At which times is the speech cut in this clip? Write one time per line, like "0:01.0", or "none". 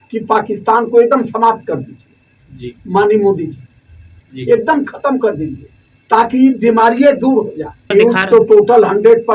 0:07.9

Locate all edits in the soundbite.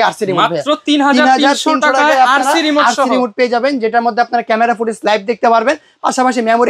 none

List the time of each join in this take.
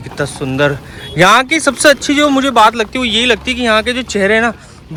none

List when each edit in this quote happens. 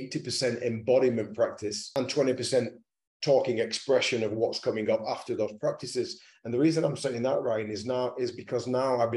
0:01.8

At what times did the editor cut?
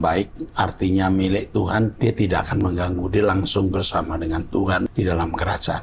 0:01.9
0:04.9

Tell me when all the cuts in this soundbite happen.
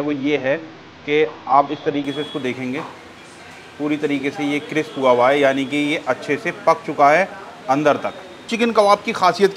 0:08.5

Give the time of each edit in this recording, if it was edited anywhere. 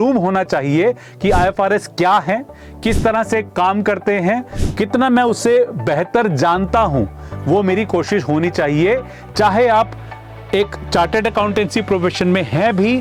none

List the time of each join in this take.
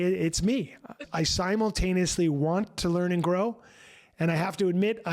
0:01.0

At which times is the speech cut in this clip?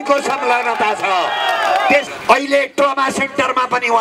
0:02.1

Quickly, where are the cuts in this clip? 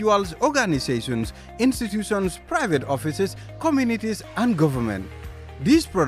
none

